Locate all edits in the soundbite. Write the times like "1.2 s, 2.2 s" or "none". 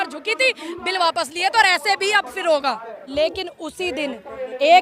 3.0 s